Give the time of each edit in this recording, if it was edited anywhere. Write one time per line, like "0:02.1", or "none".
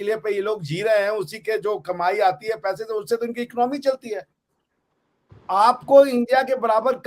none